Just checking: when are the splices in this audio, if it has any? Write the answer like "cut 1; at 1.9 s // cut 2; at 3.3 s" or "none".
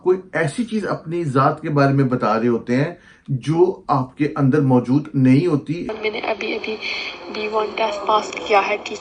cut 1; at 5.9 s